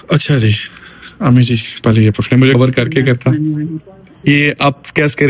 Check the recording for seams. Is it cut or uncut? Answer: cut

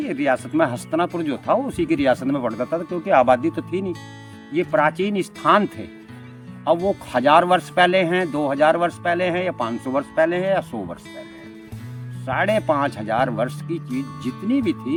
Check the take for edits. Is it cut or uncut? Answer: uncut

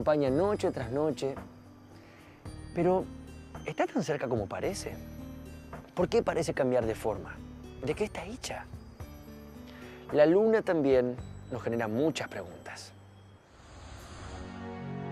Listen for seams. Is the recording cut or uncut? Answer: cut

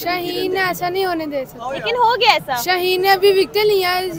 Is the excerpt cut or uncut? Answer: uncut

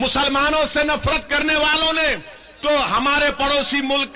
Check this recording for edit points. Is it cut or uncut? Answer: uncut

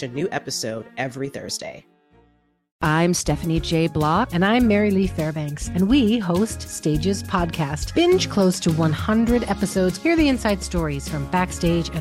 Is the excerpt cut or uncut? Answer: cut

